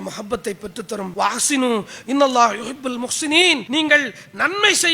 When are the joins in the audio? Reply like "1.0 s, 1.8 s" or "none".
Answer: 1.1 s, 3.6 s